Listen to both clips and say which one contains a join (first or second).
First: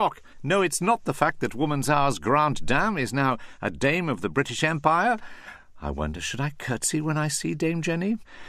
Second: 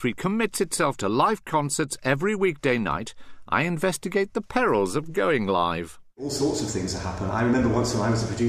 second